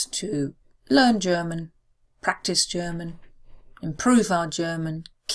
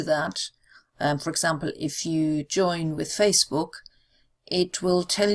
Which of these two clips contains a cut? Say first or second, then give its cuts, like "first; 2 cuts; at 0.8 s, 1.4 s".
second; 1 cut; at 3.1 s